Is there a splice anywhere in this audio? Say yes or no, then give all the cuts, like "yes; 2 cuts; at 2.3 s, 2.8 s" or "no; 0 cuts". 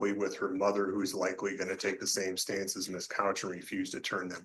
no; 0 cuts